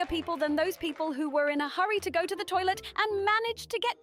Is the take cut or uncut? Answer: uncut